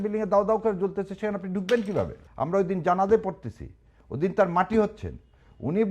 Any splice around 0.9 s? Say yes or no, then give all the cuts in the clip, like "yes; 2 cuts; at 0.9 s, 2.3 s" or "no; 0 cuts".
no; 1 cut; at 2.2 s